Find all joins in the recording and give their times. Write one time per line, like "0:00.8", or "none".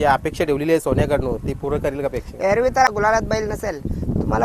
0:02.9

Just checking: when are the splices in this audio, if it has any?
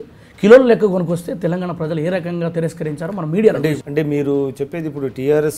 0:03.8

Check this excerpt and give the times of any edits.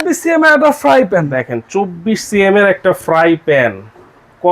none

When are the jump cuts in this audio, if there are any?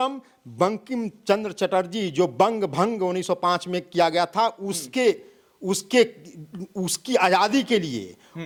none

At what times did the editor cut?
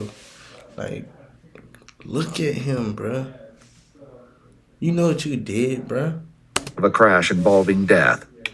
none

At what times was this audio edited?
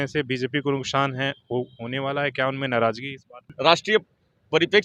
0:03.5

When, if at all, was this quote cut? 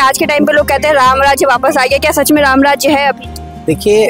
none

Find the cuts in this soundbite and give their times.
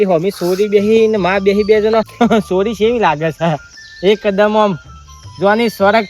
0:02.1

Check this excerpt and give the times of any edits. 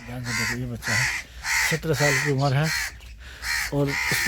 none

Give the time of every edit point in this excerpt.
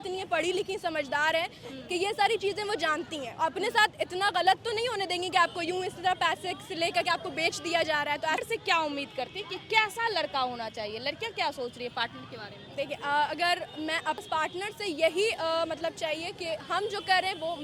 0:08.4
0:14.2

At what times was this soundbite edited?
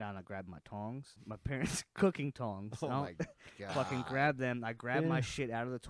0:01.2

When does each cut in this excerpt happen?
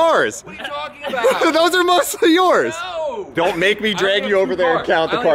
0:03.3

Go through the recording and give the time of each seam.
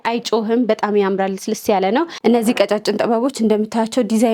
0:02.1

